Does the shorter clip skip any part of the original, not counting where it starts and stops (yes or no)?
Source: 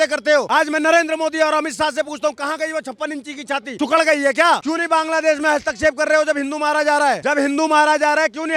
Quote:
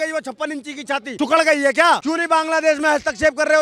no